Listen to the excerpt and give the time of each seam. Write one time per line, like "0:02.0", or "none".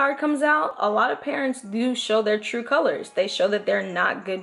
none